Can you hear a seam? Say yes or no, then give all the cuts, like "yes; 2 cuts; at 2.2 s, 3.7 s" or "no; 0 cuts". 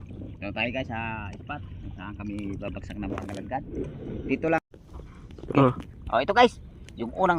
yes; 1 cut; at 4.6 s